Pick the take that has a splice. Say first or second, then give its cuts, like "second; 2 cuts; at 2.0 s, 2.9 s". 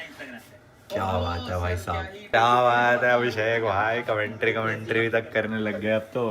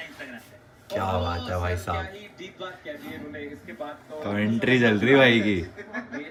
first; 1 cut; at 2.2 s